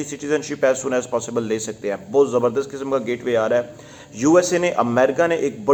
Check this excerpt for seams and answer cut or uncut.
uncut